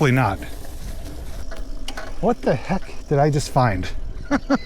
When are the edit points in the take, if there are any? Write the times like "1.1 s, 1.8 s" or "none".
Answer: 1.0 s